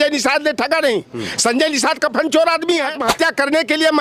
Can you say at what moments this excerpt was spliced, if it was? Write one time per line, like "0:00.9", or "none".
0:03.0